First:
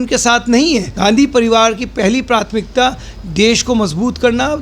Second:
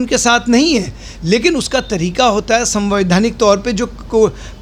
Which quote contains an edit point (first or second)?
first